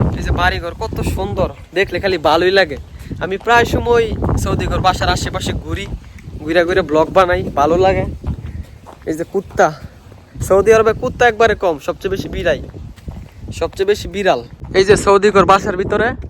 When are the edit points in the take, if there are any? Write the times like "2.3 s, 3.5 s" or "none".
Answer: 14.6 s